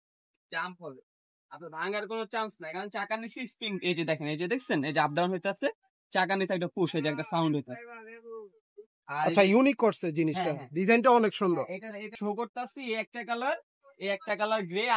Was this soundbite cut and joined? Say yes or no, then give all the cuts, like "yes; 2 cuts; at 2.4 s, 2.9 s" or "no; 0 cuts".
no; 0 cuts